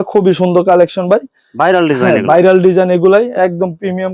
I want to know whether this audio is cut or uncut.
uncut